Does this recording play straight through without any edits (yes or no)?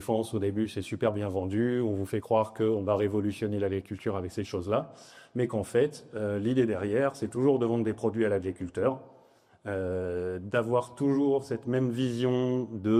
yes